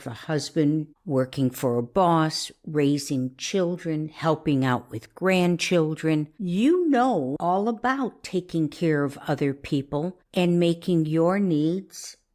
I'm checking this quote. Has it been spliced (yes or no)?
no